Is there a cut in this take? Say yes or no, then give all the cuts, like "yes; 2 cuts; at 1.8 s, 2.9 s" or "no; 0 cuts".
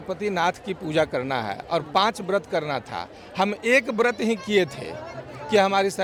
no; 0 cuts